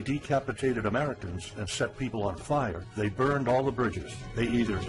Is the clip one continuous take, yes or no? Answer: no